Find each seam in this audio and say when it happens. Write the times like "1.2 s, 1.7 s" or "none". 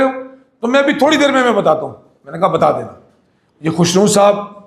3.8 s